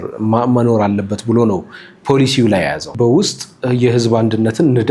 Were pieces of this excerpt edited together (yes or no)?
yes